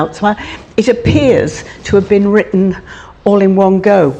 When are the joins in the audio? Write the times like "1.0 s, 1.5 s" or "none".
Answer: none